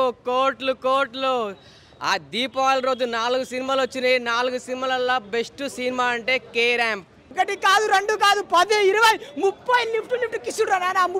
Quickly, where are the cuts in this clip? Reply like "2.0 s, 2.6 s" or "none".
7.3 s